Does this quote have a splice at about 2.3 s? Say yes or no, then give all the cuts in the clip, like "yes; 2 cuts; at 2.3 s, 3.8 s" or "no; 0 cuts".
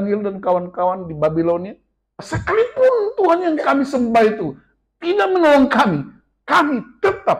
yes; 1 cut; at 2.3 s